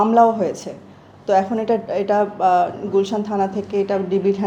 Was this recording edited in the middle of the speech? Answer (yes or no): no